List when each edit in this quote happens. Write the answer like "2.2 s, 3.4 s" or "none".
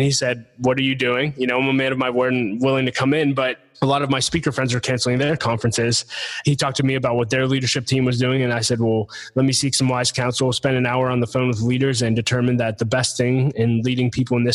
6.3 s